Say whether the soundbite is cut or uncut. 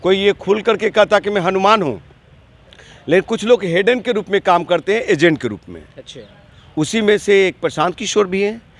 uncut